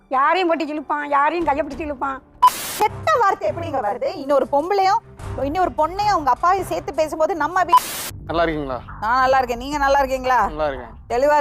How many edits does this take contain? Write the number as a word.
two